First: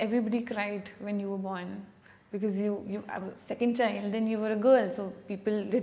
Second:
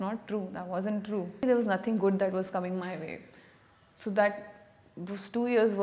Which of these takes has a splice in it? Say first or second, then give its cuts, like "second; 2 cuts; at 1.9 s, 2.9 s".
second; 1 cut; at 1.4 s